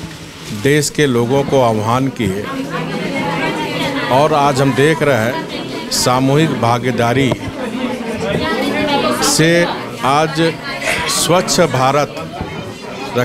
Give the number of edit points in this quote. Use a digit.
0